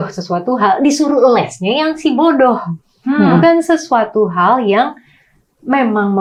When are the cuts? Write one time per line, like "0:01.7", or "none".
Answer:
none